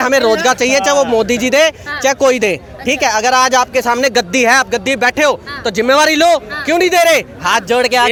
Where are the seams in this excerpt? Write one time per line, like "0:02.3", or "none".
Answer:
none